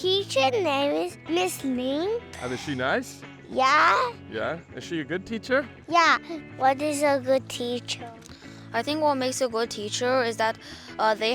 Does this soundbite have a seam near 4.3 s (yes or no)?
no